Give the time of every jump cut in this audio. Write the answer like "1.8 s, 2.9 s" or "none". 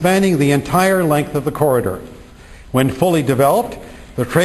2.4 s